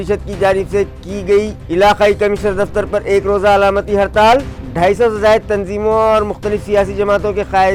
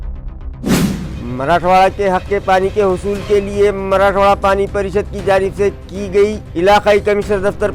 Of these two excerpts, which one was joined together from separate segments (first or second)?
second